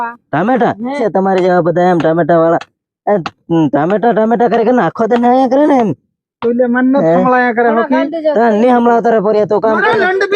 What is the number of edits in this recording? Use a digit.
1